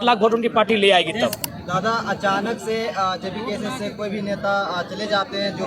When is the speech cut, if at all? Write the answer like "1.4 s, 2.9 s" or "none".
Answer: 1.5 s